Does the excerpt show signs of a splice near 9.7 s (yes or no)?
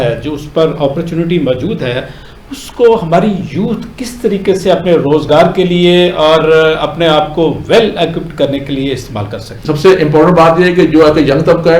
yes